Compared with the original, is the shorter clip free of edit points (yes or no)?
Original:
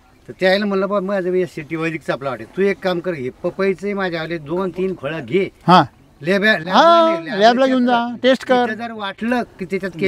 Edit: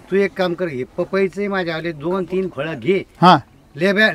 yes